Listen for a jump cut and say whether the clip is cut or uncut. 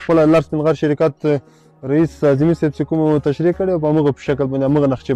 uncut